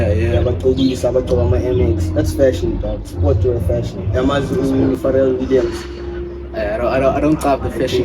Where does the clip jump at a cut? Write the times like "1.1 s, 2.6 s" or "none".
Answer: 4.0 s